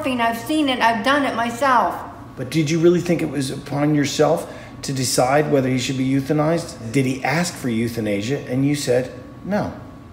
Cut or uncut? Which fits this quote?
cut